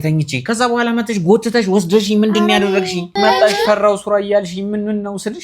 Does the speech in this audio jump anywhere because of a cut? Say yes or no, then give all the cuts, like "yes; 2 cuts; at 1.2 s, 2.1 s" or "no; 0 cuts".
yes; 1 cut; at 3.1 s